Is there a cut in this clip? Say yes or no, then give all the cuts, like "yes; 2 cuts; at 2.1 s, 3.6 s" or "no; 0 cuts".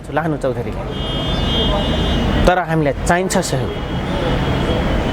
no; 0 cuts